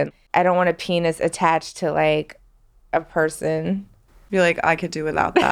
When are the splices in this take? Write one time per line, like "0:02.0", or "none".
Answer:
none